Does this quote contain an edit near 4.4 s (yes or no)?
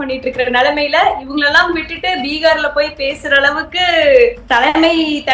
yes